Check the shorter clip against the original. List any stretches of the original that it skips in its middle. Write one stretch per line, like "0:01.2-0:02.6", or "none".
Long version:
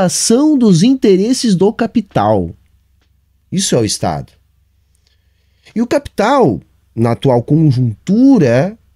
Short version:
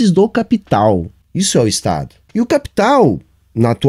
0:02.6-0:03.4
0:04.3-0:05.6